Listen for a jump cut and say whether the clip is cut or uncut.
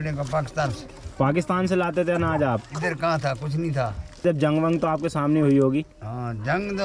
cut